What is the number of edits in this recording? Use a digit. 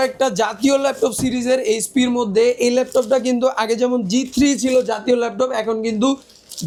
0